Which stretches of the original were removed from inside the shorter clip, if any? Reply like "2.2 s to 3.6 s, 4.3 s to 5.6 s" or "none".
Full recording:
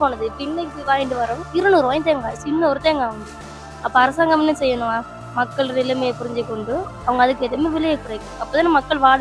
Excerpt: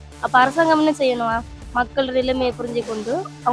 none